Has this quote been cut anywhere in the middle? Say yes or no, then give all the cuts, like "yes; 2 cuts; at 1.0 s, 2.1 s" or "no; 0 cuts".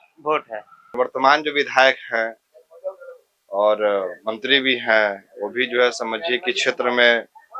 yes; 1 cut; at 1.0 s